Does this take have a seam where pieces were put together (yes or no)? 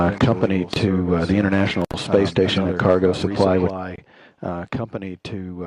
yes